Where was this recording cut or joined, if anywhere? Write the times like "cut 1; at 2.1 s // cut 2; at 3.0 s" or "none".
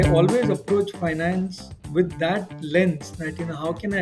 none